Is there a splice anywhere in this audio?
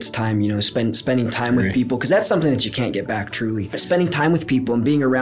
yes; 1 cut; at 3.8 s

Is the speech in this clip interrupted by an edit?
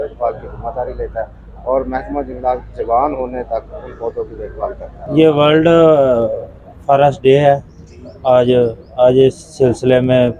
yes; 1 cut; at 4.9 s

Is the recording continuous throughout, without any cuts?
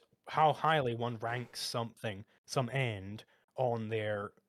yes; 0 cuts

